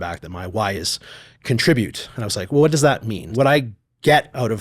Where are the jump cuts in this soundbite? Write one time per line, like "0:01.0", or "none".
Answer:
0:03.3